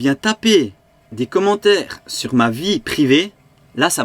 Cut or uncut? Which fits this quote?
uncut